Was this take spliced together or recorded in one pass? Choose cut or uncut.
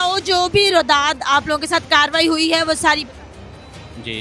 uncut